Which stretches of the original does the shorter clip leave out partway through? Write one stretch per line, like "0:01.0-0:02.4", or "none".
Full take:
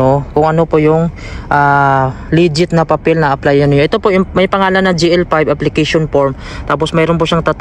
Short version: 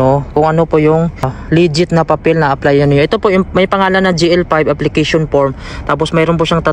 0:01.3-0:02.2

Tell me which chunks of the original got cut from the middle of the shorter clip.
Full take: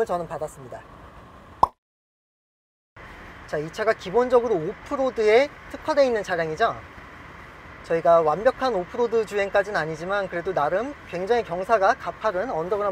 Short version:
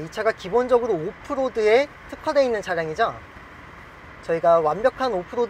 none

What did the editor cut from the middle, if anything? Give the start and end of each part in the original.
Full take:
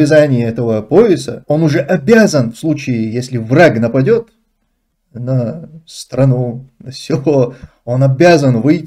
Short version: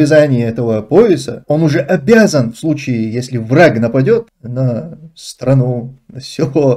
0:04.4-0:05.1

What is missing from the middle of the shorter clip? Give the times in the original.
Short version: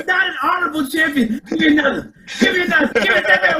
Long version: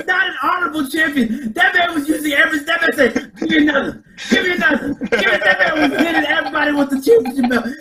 0:01.4-0:03.3
0:04.8-0:05.1

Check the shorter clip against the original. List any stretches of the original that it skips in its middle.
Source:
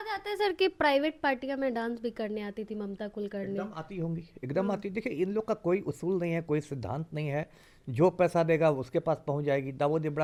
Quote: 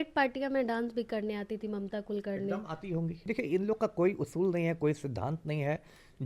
0:04.3-0:04.9

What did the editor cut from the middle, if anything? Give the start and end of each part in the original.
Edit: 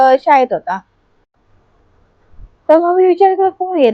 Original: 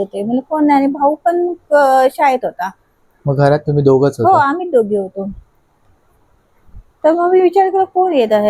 0:03.0-0:05.5

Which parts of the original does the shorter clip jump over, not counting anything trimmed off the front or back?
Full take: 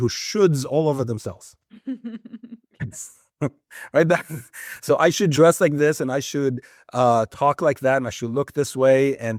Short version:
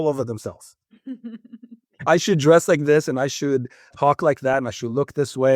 0:02.9-0:05.0
0:06.8-0:07.3

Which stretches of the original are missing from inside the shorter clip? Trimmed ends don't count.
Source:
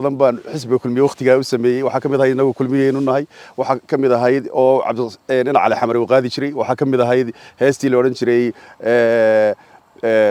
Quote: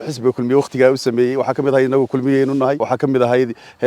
0:03.3-0:06.6

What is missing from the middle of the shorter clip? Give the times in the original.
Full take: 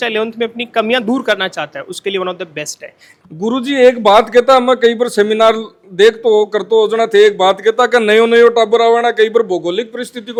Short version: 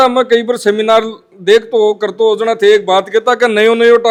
none

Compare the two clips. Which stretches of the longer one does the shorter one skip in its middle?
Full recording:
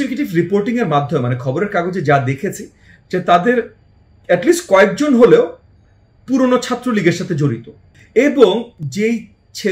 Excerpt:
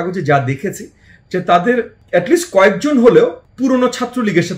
0:03.8-0:04.1
0:05.6-0:06.1

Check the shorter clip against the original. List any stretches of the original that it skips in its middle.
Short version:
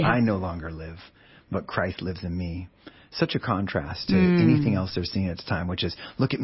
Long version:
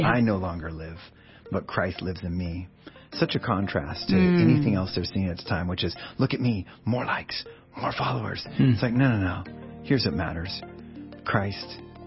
none

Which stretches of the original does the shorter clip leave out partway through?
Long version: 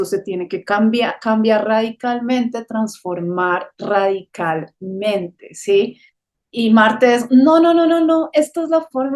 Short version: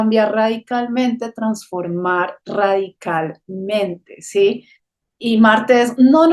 none

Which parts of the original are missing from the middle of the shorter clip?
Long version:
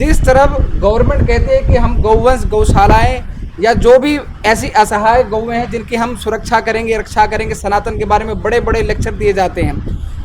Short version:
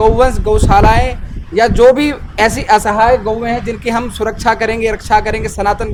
none

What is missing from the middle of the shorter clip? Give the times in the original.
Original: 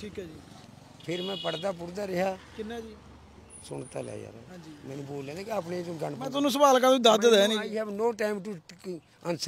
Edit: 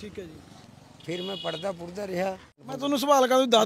0:02.6-0:06.1

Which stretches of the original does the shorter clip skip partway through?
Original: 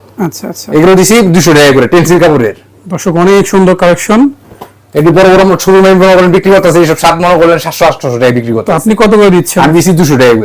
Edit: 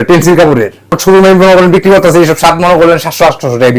0:02.8-0:05.6

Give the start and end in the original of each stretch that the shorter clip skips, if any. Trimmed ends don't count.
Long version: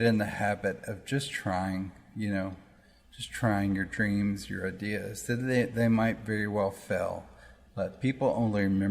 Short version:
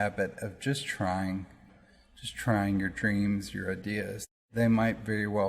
0:02.1-0:02.6
0:05.4-0:05.7

